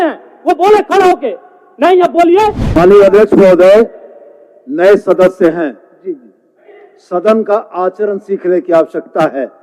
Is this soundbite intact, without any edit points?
no; 1 cut; at 2.6 s

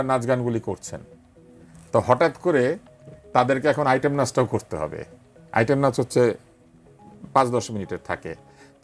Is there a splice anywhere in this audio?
no; 0 cuts

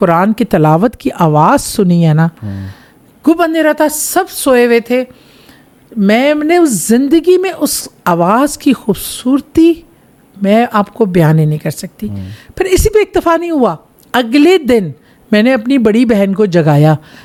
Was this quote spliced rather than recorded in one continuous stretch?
no; 0 cuts

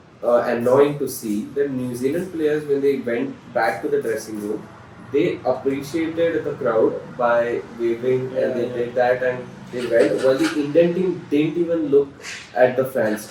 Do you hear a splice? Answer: no; 0 cuts

